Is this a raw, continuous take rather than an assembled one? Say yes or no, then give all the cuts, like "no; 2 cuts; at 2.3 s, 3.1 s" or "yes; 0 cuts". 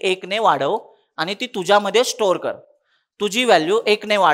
yes; 0 cuts